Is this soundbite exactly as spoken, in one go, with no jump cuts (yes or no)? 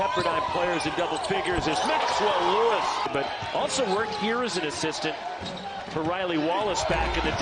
no